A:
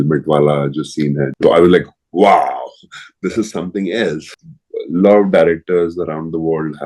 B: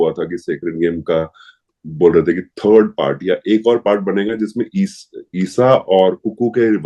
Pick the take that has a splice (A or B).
A